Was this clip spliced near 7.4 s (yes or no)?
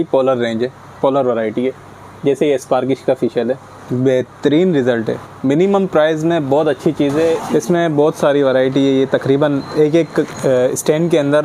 yes